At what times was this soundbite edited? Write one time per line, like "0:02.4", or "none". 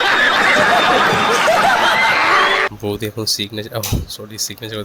0:02.7